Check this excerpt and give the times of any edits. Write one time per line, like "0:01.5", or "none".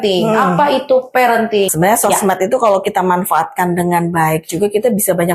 0:01.7